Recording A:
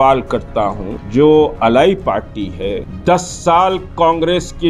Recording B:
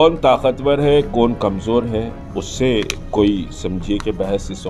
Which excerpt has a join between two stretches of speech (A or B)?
A